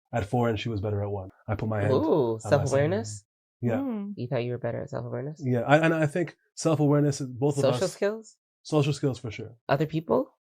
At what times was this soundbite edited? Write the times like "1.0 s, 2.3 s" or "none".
1.3 s